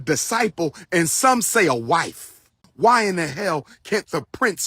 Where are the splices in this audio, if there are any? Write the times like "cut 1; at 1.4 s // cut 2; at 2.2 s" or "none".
cut 1; at 2.6 s

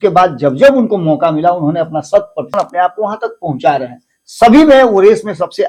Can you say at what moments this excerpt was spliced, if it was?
cut 1; at 2.5 s

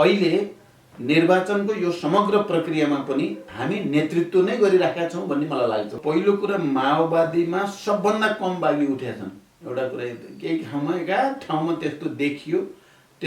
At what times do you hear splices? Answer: cut 1; at 6.0 s

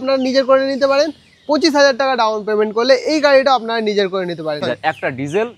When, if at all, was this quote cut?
cut 1; at 4.6 s

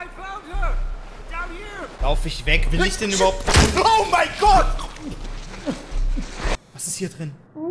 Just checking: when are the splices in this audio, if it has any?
cut 1; at 6.5 s

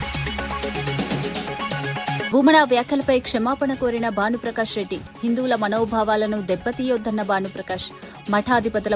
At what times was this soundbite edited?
cut 1; at 0.7 s // cut 2; at 2.3 s

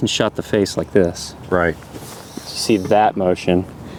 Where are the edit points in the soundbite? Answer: none

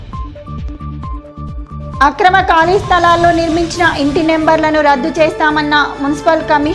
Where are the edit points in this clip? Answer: cut 1; at 1.7 s

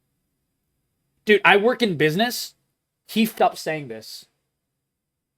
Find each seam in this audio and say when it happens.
cut 1; at 3.3 s

